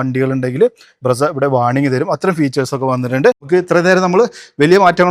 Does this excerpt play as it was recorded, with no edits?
no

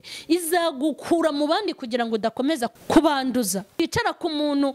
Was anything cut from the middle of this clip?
yes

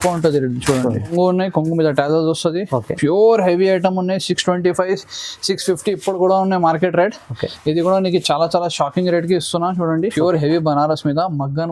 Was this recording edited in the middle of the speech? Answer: yes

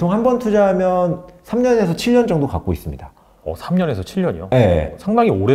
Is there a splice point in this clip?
no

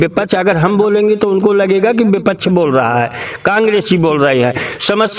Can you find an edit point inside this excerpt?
no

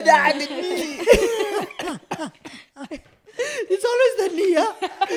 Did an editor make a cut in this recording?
no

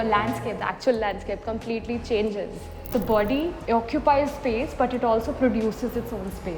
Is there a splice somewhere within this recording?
yes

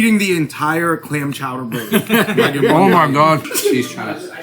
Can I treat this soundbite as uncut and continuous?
no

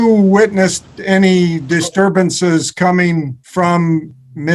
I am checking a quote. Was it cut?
yes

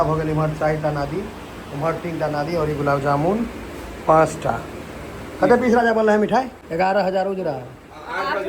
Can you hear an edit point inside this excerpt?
yes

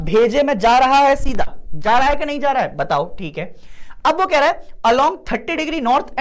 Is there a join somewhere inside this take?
no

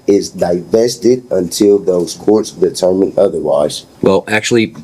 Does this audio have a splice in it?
yes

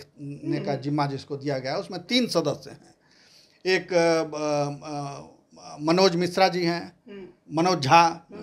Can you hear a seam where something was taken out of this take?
no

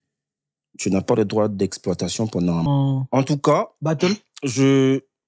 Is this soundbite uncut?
no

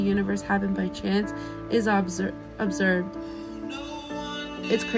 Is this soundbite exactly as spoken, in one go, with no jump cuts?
yes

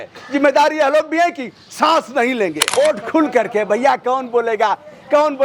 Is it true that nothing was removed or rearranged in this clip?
no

